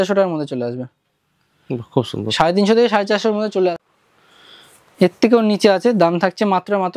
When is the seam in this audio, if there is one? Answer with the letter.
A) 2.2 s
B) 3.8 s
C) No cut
B